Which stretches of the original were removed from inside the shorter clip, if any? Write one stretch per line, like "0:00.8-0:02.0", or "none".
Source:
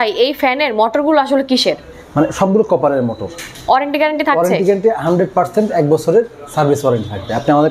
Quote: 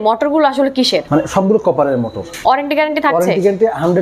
0:01.8-0:02.1
0:03.3-0:03.5